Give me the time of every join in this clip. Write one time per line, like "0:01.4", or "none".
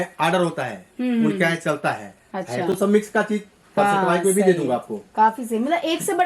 none